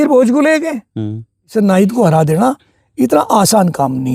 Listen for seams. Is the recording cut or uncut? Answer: cut